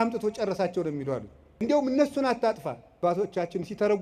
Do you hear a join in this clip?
yes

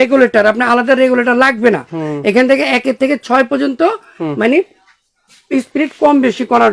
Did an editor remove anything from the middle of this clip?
no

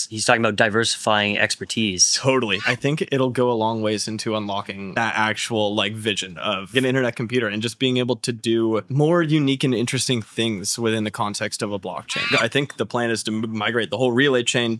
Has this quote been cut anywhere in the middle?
yes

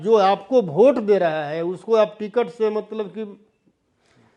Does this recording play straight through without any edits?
yes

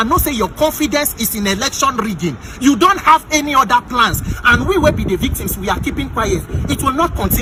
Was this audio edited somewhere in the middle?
no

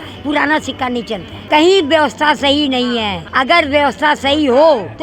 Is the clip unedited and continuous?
no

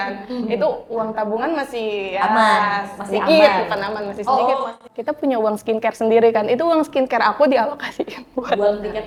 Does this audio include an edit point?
no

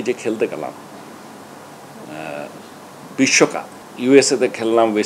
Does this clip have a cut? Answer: yes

